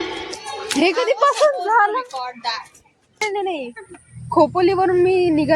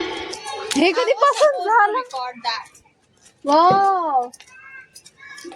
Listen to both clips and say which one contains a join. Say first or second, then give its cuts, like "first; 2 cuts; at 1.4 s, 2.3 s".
first; 1 cut; at 3.2 s